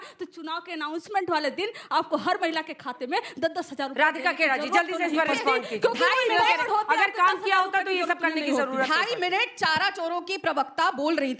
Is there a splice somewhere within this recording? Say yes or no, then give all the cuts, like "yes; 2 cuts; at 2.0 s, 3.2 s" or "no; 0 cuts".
no; 0 cuts